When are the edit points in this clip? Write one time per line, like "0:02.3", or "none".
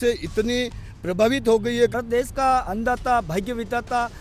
0:01.9

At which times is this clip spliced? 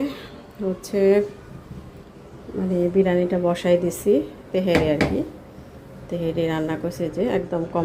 none

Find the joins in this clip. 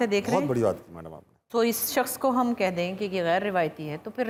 none

